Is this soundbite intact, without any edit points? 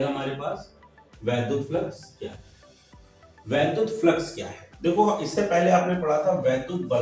yes; 0 cuts

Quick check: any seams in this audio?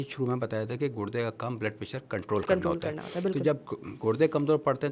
no; 0 cuts

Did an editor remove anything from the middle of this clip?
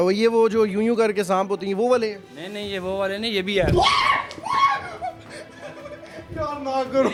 no; 0 cuts

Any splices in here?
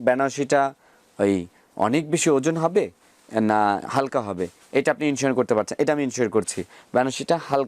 no; 0 cuts

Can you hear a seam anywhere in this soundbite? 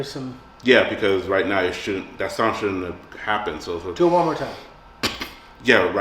no; 0 cuts

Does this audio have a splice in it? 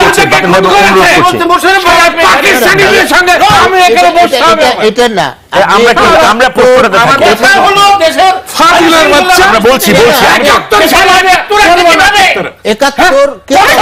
no; 0 cuts

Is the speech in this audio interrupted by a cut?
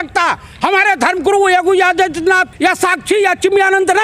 yes; 1 cut; at 2.5 s

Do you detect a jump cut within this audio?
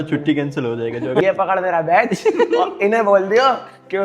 yes; 1 cut; at 1.2 s

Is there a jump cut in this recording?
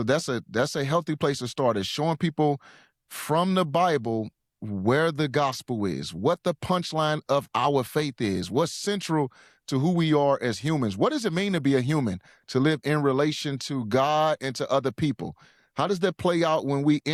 no; 0 cuts

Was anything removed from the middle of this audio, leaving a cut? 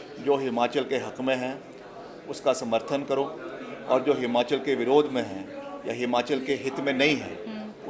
no; 0 cuts

